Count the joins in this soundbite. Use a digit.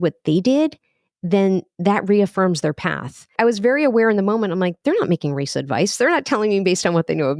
1